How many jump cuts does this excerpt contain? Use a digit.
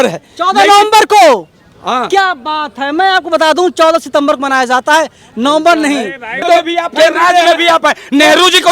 1